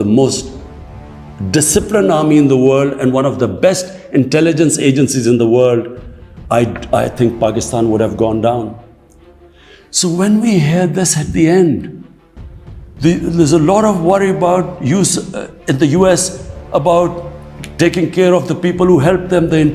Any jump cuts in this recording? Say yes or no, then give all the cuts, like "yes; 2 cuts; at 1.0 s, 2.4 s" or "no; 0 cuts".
no; 0 cuts